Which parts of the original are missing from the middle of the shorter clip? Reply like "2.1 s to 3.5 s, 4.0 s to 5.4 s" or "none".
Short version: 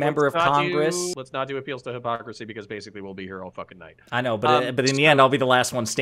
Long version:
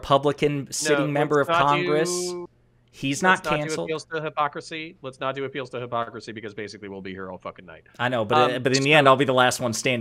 2.3 s to 5.0 s